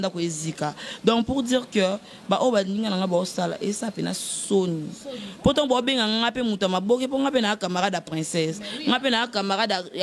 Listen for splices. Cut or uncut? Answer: uncut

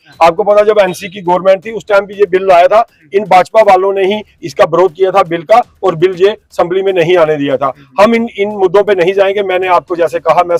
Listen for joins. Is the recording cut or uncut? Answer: uncut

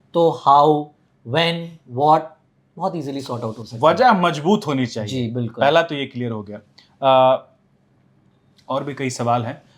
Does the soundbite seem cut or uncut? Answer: uncut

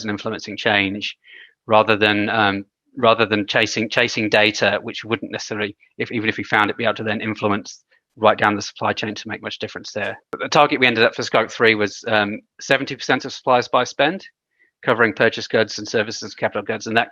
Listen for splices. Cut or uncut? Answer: cut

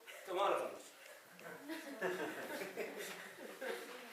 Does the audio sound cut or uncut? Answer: uncut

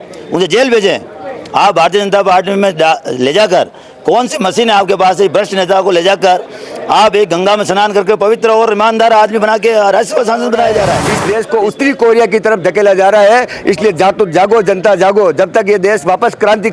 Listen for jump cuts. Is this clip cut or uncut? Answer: cut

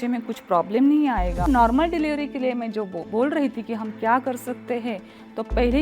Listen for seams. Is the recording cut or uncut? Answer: cut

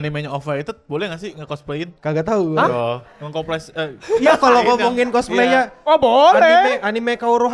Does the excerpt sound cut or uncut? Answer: cut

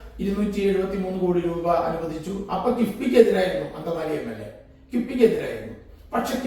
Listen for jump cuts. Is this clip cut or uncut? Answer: uncut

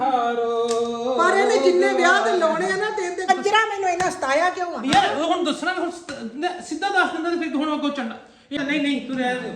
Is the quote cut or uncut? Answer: cut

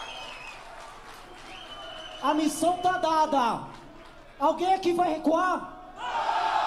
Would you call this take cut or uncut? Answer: uncut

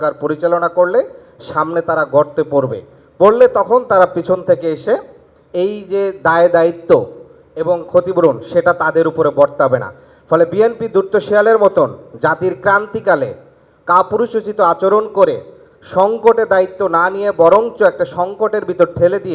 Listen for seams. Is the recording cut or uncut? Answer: uncut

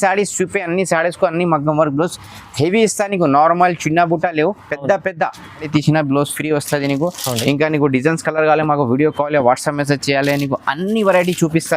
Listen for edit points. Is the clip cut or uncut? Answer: cut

